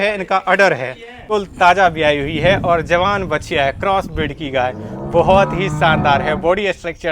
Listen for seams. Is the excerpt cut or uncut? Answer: cut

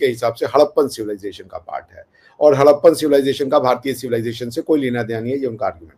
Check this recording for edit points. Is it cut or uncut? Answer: uncut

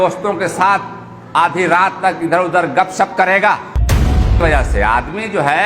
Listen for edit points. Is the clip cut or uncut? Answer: cut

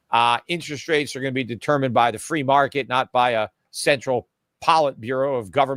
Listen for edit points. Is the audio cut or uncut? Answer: uncut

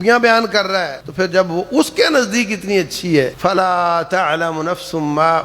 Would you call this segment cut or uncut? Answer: cut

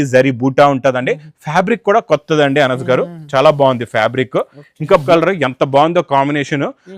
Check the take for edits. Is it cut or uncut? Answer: cut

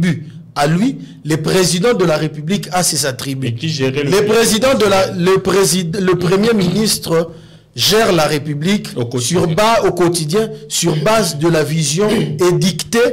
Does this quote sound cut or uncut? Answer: uncut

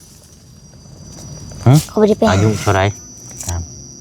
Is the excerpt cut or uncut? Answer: cut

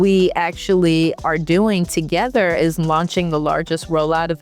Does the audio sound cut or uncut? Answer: uncut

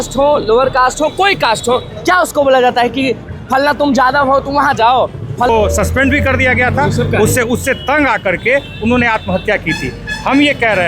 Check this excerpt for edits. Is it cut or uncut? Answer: cut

